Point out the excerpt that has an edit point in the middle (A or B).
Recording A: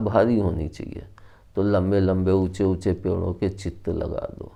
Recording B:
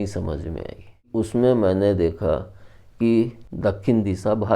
B